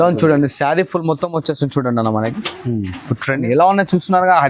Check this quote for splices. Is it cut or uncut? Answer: cut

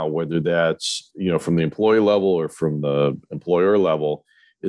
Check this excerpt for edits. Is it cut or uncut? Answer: uncut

